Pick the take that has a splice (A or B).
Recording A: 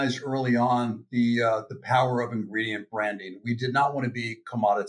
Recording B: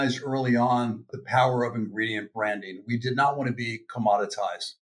B